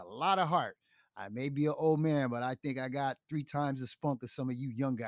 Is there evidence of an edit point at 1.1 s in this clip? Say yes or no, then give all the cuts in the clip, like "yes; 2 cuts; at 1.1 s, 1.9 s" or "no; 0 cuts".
no; 0 cuts